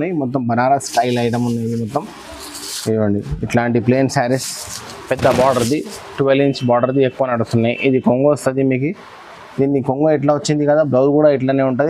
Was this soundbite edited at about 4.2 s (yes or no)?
no